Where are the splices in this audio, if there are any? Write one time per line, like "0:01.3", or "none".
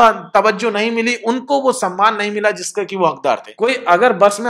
0:03.5